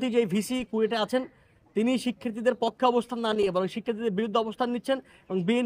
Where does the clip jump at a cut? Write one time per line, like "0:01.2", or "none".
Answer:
none